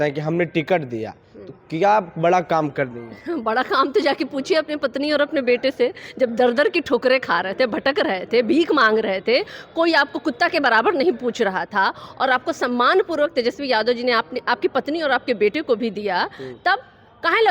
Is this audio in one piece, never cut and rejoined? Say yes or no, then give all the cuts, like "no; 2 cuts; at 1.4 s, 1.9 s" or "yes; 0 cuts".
yes; 0 cuts